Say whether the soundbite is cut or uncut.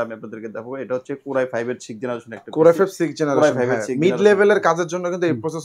uncut